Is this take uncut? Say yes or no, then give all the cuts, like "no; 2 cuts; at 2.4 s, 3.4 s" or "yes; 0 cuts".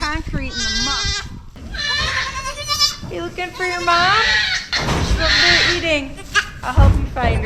no; 3 cuts; at 1.6 s, 4.6 s, 6.5 s